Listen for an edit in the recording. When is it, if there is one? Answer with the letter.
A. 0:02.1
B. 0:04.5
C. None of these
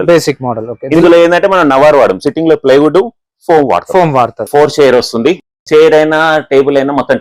B